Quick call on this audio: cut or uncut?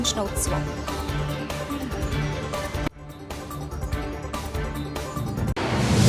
uncut